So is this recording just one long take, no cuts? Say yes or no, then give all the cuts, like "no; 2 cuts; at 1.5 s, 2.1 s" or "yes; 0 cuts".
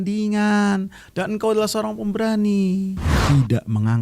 no; 1 cut; at 3.1 s